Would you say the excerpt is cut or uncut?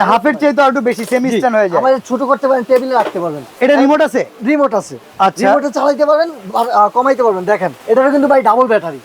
cut